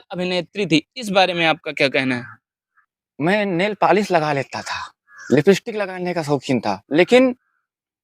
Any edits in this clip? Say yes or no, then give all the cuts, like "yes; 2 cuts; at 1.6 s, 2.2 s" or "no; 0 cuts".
yes; 1 cut; at 3.0 s